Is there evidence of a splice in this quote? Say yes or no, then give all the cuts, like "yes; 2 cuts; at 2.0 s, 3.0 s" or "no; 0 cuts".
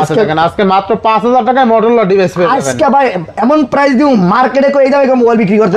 no; 0 cuts